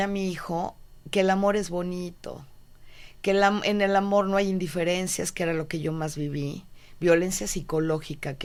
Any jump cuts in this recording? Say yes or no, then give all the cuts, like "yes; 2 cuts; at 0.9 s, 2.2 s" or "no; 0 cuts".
no; 0 cuts